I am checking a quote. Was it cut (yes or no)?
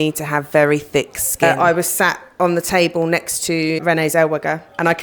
yes